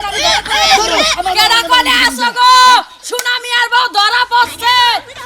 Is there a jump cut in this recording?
no; 0 cuts

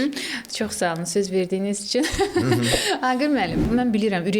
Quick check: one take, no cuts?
yes; 0 cuts

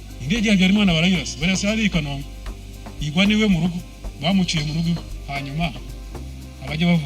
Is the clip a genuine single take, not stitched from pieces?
no; 1 cut; at 5.1 s

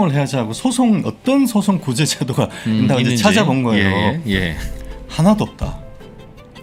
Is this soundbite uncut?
yes; 0 cuts

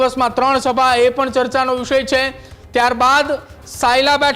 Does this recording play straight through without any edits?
yes; 0 cuts

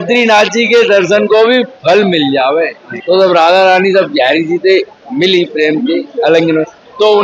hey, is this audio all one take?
no; 1 cut; at 2.9 s

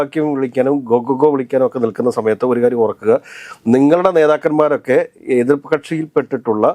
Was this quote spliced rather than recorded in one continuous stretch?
no; 0 cuts

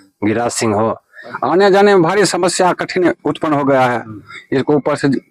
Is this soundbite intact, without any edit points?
no; 1 cut; at 1.3 s

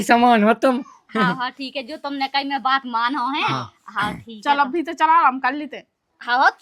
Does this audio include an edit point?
no; 0 cuts

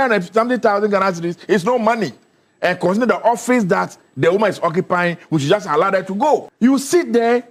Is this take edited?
no; 0 cuts

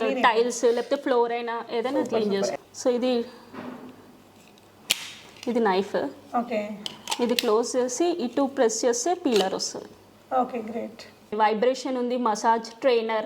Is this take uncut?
no; 2 cuts; at 2.5 s, 11.3 s

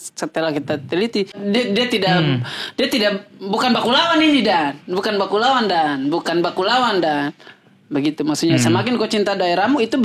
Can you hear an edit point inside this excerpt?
yes; 1 cut; at 1.4 s

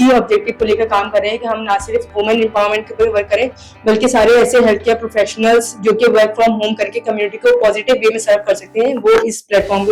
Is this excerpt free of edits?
yes; 0 cuts

